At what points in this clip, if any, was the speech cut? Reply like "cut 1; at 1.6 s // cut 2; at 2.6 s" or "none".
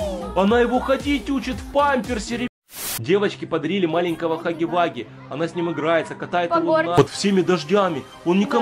cut 1; at 2.5 s // cut 2; at 7.0 s